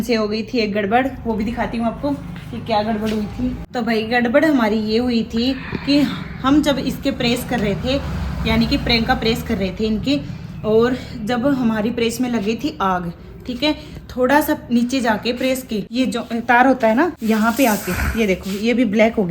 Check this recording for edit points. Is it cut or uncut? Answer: cut